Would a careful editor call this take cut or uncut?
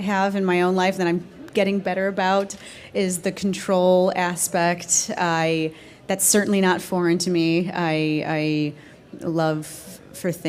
uncut